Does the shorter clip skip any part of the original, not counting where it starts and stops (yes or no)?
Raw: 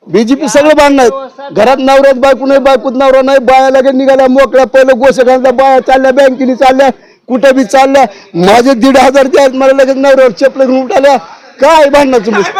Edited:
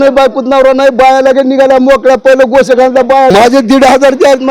yes